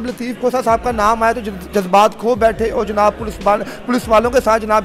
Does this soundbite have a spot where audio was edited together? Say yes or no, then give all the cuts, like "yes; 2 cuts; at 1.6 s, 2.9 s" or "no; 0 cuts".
no; 0 cuts